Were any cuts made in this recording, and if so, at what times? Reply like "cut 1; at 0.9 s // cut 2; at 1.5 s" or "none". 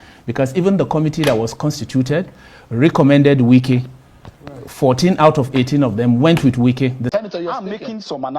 cut 1; at 7.0 s